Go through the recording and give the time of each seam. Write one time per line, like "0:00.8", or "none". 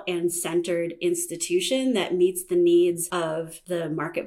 0:03.3